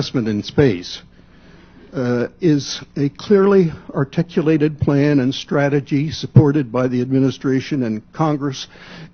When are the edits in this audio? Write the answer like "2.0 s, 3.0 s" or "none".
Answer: none